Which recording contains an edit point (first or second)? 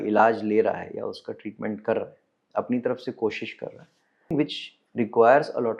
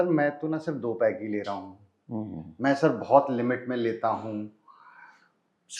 first